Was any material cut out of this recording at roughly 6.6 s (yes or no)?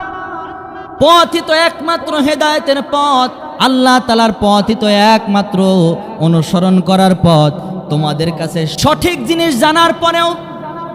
no